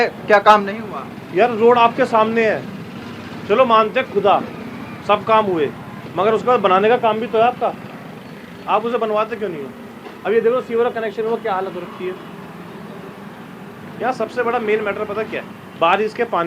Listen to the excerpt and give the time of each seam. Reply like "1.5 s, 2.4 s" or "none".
none